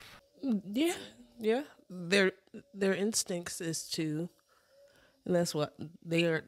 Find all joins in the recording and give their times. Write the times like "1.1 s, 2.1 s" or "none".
none